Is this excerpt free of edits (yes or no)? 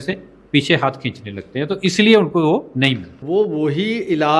no